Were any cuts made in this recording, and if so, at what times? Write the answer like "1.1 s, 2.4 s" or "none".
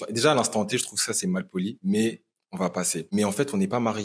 3.1 s